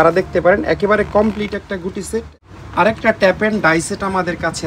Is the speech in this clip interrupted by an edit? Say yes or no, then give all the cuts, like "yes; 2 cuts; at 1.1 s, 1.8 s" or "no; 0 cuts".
yes; 1 cut; at 2.3 s